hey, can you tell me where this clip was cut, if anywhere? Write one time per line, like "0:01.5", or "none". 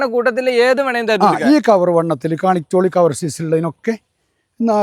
none